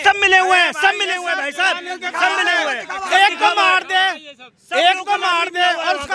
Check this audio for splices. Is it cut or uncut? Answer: uncut